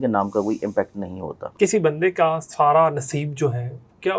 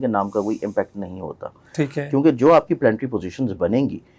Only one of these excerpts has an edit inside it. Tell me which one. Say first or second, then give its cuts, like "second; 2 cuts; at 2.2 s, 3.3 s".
first; 1 cut; at 1.4 s